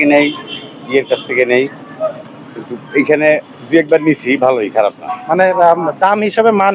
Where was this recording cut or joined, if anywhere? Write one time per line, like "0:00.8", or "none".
0:05.1